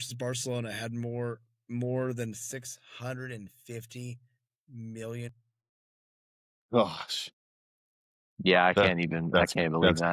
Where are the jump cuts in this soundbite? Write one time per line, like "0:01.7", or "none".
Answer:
none